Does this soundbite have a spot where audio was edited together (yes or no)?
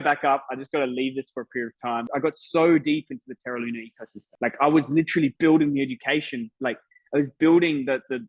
yes